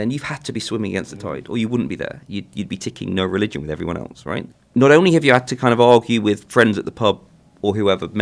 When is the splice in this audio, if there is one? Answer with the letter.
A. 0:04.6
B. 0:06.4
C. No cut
A